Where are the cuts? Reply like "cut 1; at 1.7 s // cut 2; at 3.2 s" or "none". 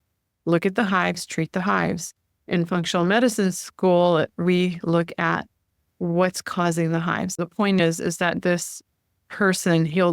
cut 1; at 7.4 s